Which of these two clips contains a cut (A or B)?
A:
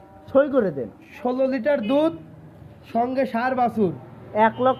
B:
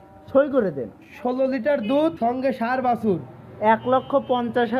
B